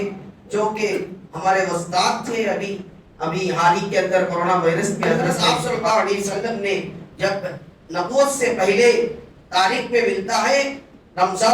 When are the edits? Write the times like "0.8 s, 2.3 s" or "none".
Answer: 5.5 s